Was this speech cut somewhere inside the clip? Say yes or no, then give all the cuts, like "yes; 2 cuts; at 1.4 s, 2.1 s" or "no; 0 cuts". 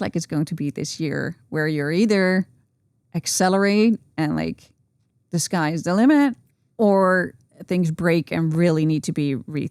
no; 0 cuts